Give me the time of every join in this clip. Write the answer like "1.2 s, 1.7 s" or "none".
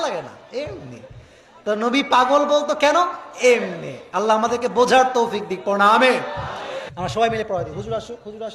6.8 s